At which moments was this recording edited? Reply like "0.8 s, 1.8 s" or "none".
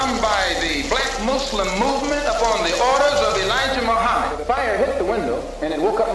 4.4 s